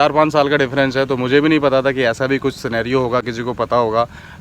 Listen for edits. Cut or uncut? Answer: uncut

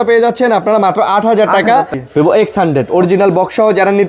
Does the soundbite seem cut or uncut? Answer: cut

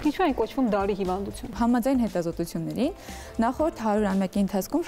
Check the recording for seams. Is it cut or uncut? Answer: cut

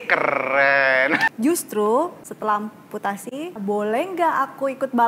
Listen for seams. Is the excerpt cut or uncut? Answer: cut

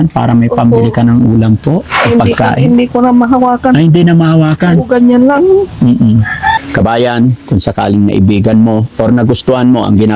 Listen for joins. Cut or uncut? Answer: cut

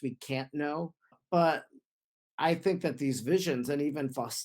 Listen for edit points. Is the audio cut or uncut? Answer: cut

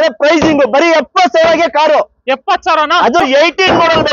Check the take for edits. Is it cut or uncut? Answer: cut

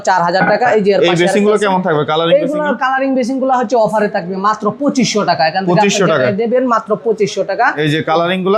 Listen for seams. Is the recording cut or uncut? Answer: uncut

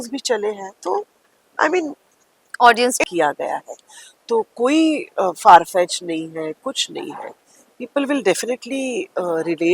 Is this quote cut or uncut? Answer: cut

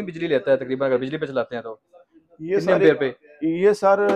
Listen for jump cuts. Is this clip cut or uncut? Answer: uncut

